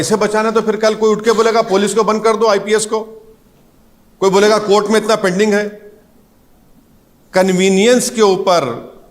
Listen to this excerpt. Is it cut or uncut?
uncut